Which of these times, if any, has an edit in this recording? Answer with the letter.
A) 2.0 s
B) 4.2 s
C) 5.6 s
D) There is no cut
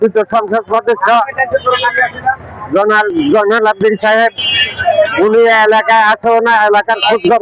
D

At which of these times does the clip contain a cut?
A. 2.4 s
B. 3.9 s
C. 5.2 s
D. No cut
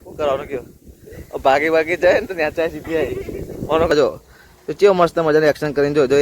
B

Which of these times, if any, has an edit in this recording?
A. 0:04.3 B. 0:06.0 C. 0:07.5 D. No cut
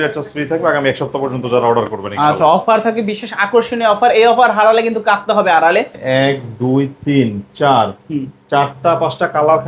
B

